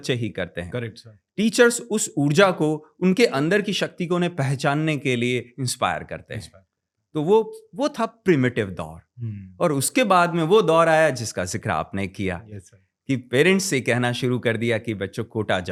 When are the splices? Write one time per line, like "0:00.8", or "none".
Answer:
none